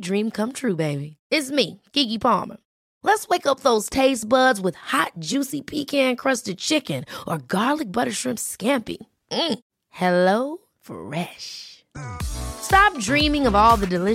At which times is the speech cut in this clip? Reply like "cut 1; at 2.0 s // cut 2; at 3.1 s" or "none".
none